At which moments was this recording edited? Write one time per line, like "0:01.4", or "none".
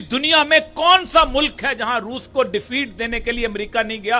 none